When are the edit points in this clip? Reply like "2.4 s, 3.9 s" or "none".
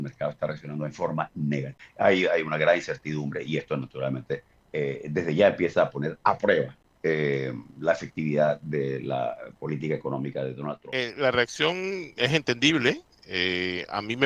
1.8 s, 4.6 s, 6.8 s, 10.9 s

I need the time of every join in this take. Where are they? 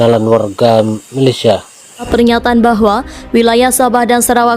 2.1 s

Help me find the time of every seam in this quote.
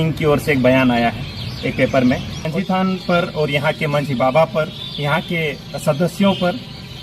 2.4 s

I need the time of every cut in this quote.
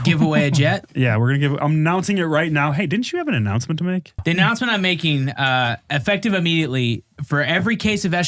4.2 s

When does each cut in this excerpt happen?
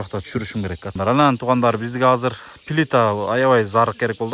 1.0 s

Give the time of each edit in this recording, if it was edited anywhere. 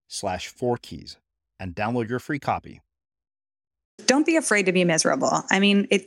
4.0 s

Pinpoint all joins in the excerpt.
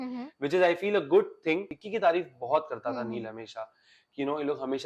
1.8 s

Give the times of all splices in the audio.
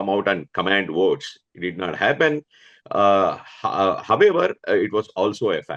none

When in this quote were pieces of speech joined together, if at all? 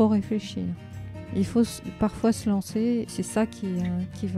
3.1 s

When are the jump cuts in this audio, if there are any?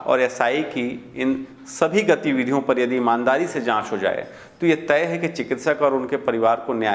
none

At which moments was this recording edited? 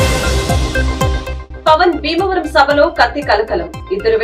1.0 s

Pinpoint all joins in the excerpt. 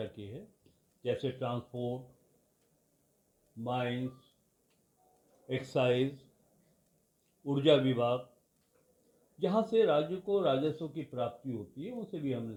none

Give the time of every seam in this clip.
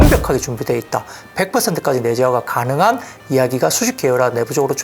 none

